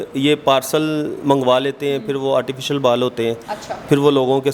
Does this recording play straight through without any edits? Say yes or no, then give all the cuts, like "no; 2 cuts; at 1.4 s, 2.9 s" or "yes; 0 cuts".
yes; 0 cuts